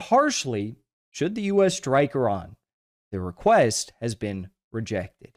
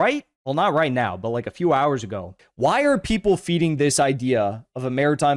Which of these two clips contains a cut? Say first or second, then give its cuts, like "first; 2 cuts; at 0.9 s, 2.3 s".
second; 1 cut; at 2.4 s